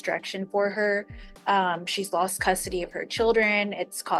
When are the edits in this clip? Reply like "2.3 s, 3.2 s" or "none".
none